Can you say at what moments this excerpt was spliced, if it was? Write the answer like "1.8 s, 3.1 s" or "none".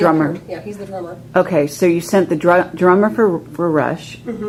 none